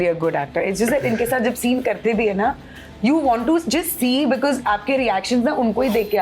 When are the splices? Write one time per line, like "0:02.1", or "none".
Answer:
none